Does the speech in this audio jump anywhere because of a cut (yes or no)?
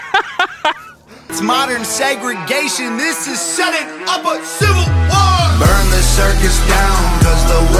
yes